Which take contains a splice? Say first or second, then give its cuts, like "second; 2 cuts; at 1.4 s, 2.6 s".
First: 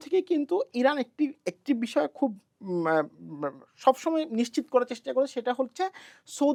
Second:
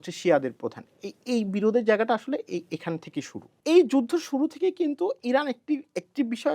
second; 1 cut; at 3.6 s